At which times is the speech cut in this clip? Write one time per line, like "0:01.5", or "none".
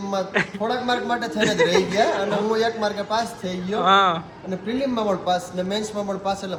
none